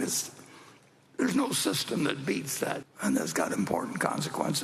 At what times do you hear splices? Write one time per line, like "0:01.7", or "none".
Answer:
0:02.8